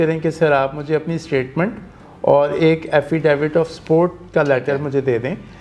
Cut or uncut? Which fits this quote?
uncut